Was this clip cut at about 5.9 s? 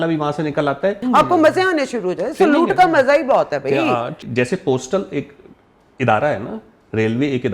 no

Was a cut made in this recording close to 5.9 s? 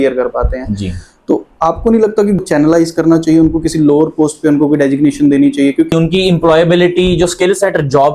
yes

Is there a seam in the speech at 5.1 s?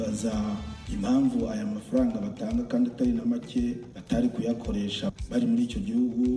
yes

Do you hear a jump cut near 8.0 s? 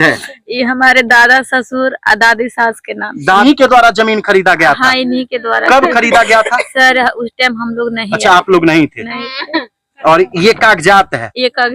no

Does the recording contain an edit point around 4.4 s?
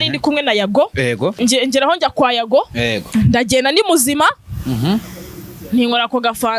no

